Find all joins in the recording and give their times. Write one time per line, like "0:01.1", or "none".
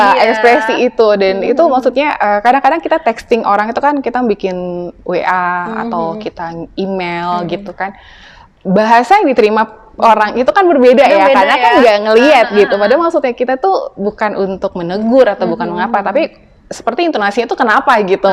none